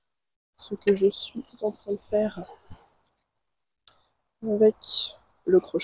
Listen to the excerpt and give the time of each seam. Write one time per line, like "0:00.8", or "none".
none